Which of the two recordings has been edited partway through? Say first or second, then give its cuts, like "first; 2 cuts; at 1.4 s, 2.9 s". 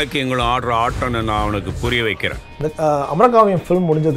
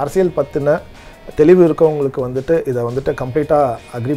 first; 1 cut; at 2.5 s